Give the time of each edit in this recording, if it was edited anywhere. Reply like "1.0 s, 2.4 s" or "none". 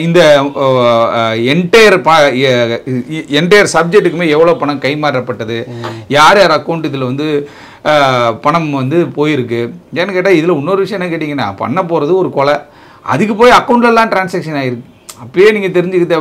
none